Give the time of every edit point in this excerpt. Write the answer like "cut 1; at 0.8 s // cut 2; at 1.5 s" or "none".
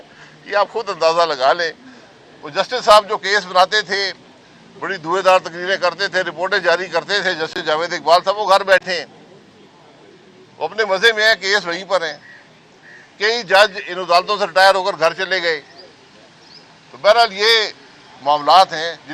none